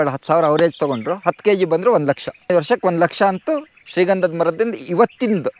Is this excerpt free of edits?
no; 1 cut; at 2.5 s

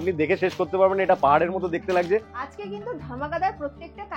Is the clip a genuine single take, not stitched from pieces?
no; 1 cut; at 2.4 s

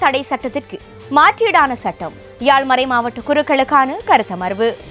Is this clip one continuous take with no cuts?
yes; 0 cuts

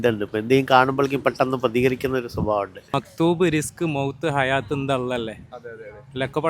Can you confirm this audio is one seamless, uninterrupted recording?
no; 1 cut; at 2.8 s

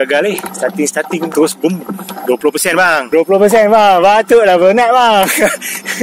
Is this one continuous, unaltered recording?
yes; 0 cuts

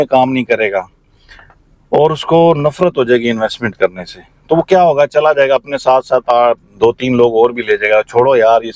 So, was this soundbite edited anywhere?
no; 0 cuts

